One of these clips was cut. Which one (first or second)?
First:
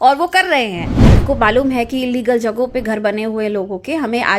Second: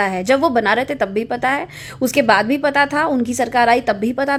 first